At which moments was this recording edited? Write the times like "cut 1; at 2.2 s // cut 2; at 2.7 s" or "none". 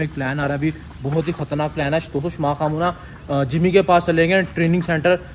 none